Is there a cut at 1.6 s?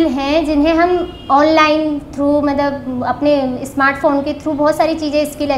no; 0 cuts

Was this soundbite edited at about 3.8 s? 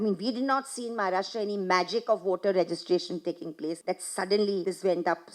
yes; 2 cuts; at 3.8 s, 4.6 s

